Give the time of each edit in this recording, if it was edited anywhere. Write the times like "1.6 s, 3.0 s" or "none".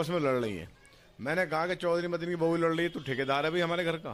none